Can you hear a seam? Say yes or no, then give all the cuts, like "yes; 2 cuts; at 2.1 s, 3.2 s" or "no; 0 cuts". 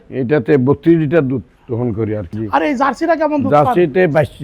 yes; 1 cut; at 2.3 s